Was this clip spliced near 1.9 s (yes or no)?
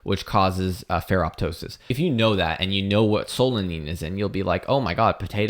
yes